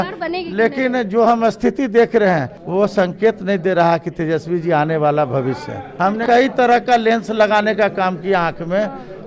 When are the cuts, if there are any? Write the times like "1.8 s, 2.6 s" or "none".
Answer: 2.6 s, 6.1 s